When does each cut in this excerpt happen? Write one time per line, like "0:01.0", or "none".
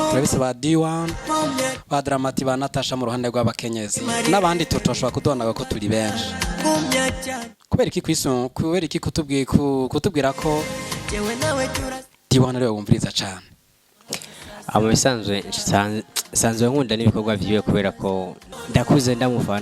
0:18.5